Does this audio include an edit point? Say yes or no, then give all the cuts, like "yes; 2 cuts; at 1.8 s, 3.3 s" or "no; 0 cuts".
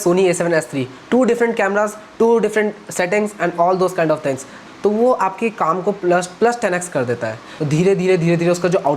yes; 2 cuts; at 4.6 s, 7.5 s